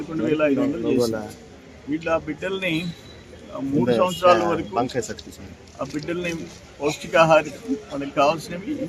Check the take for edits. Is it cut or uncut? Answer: uncut